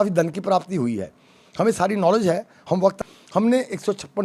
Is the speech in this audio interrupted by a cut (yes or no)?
yes